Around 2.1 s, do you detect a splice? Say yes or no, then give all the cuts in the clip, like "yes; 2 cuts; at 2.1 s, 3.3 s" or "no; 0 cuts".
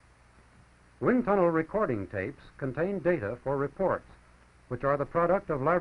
no; 1 cut; at 3.6 s